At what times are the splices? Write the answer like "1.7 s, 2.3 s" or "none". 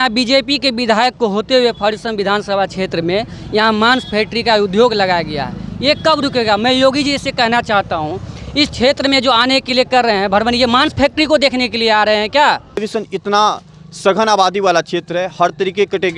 12.8 s